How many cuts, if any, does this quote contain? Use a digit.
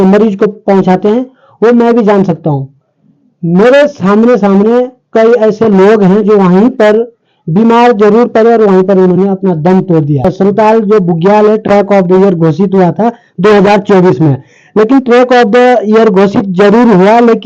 1